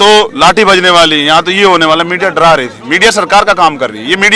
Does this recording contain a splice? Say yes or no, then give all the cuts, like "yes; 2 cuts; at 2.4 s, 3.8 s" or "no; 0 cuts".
no; 0 cuts